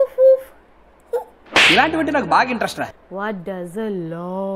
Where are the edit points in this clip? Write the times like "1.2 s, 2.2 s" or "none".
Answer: 3.0 s